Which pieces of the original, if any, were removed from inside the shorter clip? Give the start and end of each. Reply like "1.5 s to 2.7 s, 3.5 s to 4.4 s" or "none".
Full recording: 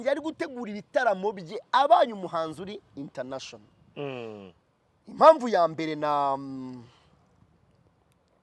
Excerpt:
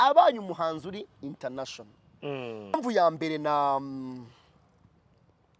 4.5 s to 5.4 s

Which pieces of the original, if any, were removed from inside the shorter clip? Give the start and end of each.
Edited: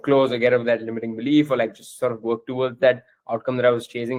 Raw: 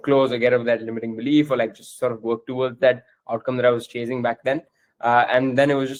none

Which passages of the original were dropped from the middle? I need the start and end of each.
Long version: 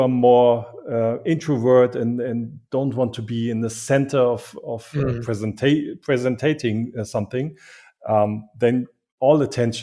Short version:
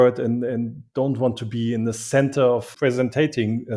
4.5 s to 6.0 s

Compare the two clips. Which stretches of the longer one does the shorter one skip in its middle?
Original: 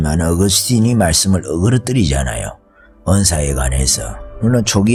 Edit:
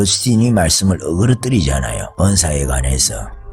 2.5 s to 2.9 s

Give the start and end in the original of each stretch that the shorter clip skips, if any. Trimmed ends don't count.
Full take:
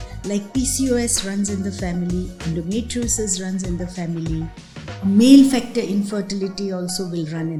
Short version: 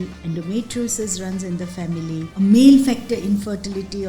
4.5 s to 4.9 s

